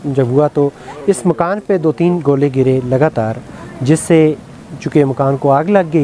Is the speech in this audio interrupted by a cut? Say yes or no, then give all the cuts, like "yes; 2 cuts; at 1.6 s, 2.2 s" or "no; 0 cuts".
no; 0 cuts